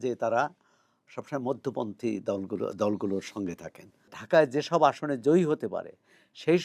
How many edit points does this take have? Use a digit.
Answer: 1